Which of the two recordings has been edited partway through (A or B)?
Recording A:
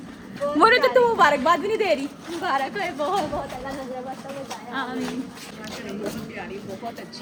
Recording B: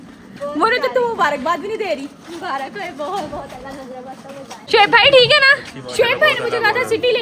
B